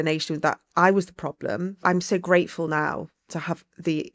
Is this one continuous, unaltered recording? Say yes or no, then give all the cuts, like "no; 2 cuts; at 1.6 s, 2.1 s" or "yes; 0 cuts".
no; 2 cuts; at 1.8 s, 3.2 s